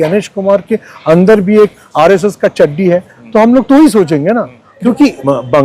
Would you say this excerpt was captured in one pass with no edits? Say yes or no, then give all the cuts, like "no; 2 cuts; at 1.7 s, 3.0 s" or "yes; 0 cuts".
no; 1 cut; at 4.7 s